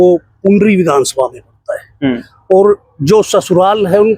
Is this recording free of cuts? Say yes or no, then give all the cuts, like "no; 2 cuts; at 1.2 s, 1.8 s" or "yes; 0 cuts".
yes; 0 cuts